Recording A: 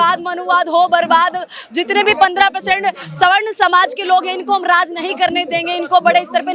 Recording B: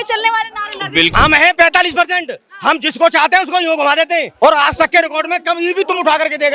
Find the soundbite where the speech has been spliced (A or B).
B